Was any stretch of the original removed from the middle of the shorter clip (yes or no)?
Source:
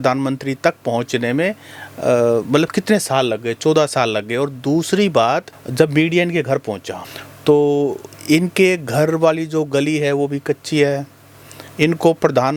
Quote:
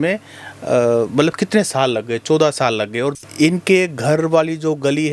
yes